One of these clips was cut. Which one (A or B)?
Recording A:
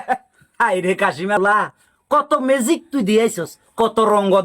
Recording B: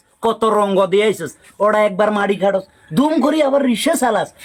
A